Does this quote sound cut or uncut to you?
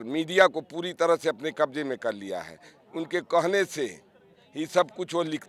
uncut